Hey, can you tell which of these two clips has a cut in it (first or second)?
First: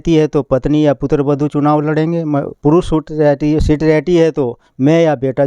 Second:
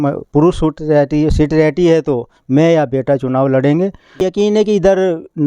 second